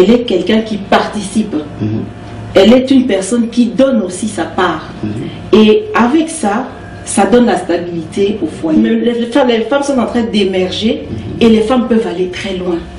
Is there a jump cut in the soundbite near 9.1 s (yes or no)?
yes